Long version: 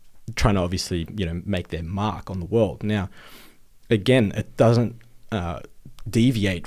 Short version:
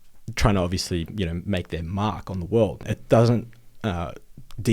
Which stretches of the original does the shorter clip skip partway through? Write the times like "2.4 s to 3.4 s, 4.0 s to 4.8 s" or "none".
2.8 s to 4.3 s